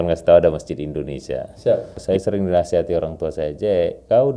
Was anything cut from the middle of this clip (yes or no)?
yes